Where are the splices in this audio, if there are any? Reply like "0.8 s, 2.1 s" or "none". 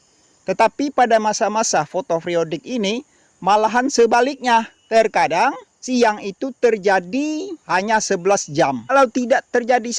4.8 s, 5.7 s, 7.5 s, 8.9 s

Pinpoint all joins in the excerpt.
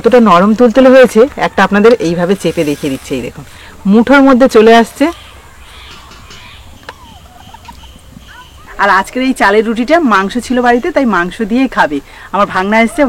6.8 s, 8.6 s

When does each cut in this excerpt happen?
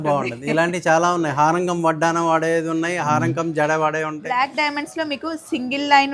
4.2 s

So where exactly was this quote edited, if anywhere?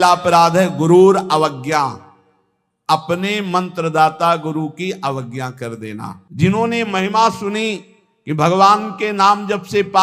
6.2 s

